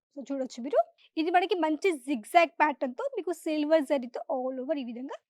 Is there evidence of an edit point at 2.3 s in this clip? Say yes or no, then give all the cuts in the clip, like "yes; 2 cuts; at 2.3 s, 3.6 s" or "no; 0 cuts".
no; 1 cut; at 1.0 s